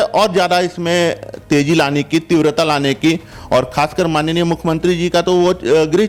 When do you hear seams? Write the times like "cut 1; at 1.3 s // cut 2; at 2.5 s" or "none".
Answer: none